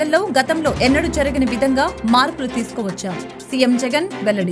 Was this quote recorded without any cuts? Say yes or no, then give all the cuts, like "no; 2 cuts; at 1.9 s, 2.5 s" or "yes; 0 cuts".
yes; 0 cuts